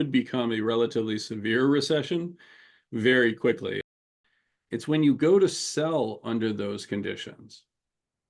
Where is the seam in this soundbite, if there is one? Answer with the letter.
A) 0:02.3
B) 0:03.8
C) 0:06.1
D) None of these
B